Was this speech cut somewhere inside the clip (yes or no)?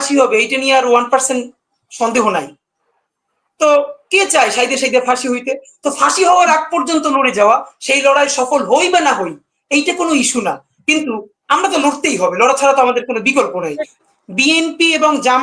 yes